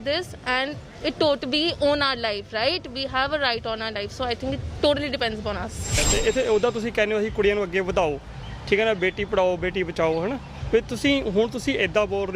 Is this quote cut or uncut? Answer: cut